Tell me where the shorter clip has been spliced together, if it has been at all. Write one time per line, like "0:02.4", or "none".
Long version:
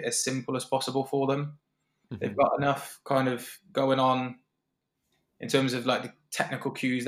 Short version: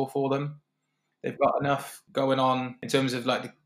0:01.9
0:02.8